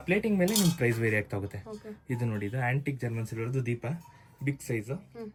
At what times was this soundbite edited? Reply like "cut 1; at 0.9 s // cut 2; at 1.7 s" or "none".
none